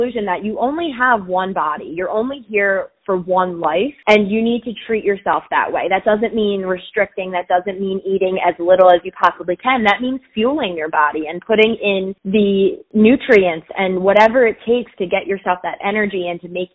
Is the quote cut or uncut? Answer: cut